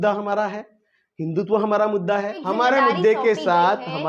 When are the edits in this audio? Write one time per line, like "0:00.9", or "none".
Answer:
0:02.4

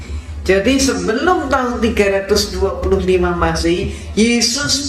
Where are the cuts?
none

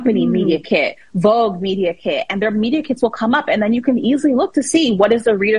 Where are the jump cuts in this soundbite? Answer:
none

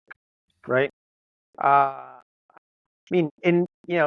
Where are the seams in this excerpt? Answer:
0:02.5

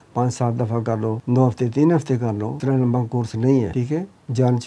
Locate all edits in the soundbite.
0:01.2
0:02.5
0:03.7

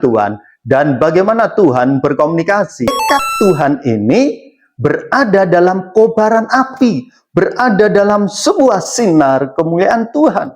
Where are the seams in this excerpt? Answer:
0:03.0

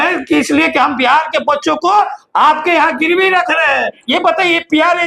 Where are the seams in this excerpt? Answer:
0:04.0

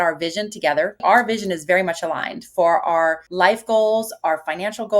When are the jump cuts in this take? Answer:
0:01.0
0:03.2

